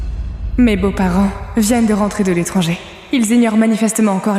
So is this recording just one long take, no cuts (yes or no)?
yes